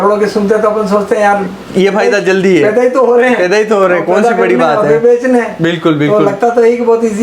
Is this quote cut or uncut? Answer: uncut